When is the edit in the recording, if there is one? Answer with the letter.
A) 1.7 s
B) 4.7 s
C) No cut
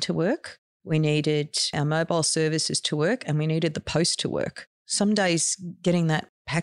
B